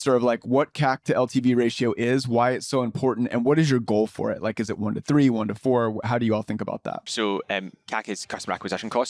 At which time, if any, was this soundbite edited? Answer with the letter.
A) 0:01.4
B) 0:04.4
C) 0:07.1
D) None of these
C